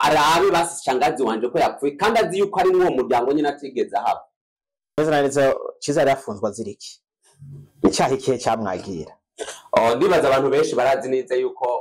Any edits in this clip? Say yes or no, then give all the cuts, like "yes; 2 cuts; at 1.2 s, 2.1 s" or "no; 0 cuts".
yes; 1 cut; at 5.0 s